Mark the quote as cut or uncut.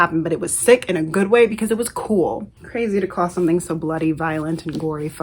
cut